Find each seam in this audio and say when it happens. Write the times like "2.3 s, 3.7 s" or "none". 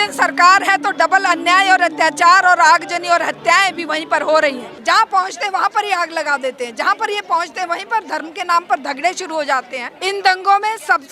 4.7 s, 9.8 s